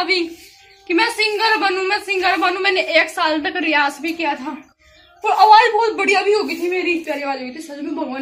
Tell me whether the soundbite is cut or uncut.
cut